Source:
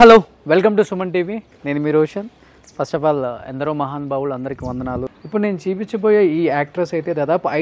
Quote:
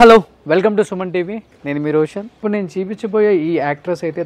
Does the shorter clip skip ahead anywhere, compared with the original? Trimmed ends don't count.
yes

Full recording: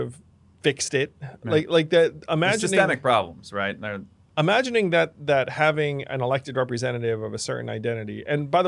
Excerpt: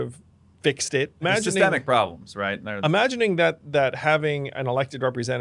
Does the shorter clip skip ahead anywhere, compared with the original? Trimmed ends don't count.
yes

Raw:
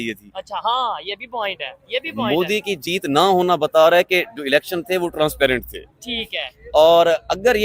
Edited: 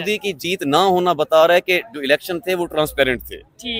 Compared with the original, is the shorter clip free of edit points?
yes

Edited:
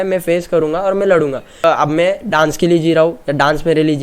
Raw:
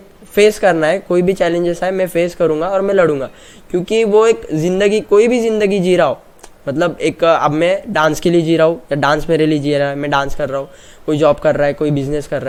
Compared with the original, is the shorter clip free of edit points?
no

